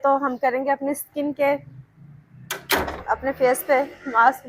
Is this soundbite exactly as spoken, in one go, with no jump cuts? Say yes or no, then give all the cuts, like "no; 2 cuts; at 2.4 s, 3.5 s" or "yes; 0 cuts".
yes; 0 cuts